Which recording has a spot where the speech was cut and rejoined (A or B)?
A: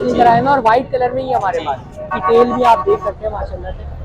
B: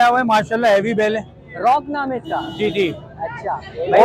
A